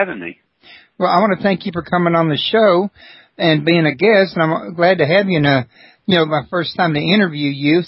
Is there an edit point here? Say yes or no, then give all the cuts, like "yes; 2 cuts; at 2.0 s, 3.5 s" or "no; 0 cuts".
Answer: no; 0 cuts